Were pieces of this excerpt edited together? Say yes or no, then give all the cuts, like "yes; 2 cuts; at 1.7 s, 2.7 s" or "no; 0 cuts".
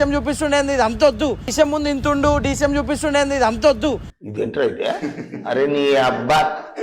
no; 0 cuts